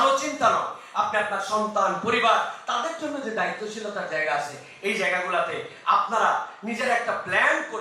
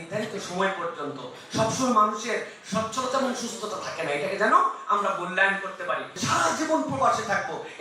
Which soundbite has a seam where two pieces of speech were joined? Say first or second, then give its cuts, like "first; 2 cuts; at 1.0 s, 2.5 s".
second; 1 cut; at 6.2 s